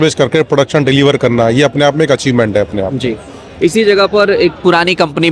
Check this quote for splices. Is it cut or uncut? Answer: uncut